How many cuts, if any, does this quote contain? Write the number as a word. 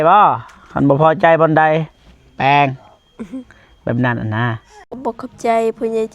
one